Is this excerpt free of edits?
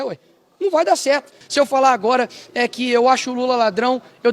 no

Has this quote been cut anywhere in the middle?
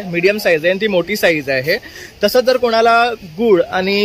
no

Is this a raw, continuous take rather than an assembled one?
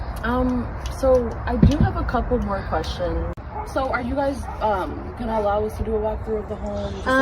no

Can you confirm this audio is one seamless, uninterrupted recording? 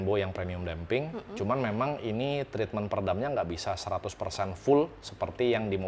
yes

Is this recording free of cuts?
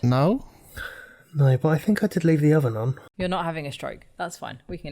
no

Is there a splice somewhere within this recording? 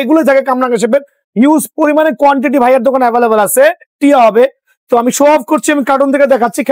yes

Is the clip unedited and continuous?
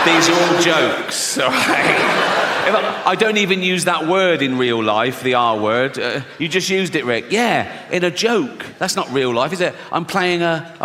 yes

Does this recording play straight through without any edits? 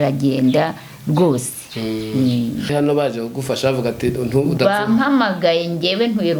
no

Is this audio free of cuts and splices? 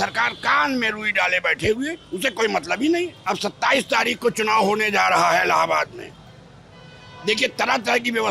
no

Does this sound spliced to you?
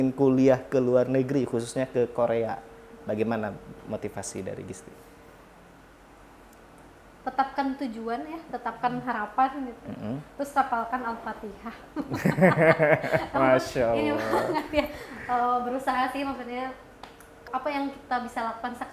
no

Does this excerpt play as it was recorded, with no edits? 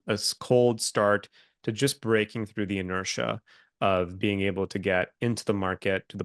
yes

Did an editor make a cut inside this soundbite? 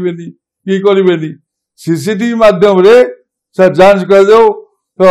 no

